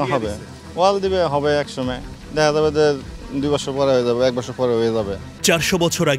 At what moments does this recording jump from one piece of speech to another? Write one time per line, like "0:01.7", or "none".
none